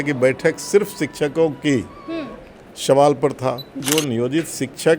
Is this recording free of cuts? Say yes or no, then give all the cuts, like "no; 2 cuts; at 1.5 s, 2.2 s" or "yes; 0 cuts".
no; 1 cut; at 3.8 s